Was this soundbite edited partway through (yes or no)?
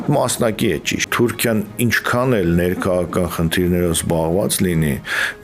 yes